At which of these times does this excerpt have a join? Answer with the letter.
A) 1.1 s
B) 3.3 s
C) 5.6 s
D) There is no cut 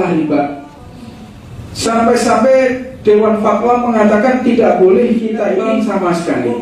C